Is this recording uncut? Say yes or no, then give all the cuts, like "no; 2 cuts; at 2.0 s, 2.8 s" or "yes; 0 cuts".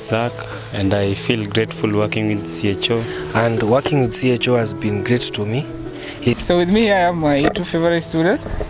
no; 2 cuts; at 3.2 s, 6.3 s